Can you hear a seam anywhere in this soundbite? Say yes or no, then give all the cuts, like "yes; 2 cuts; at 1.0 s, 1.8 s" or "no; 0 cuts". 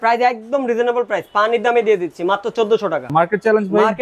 yes; 1 cut; at 3.1 s